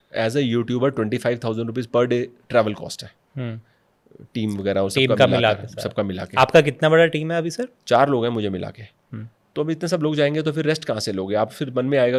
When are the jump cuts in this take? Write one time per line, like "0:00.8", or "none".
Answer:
none